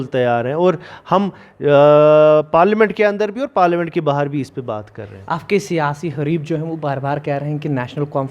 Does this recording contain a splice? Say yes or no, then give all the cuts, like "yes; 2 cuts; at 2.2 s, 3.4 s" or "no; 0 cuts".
no; 0 cuts